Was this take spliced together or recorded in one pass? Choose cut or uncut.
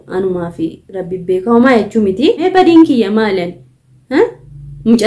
cut